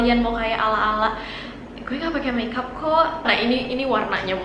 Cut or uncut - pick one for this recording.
uncut